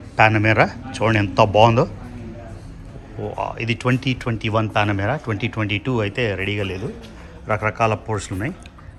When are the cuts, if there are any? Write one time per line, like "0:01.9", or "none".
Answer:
none